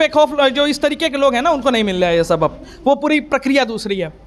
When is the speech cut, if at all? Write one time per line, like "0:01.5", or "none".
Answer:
none